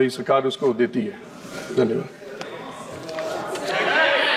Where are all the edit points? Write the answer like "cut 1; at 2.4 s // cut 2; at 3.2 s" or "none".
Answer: none